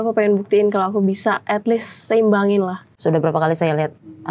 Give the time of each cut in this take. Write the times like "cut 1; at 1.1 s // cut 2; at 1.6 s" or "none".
cut 1; at 2.9 s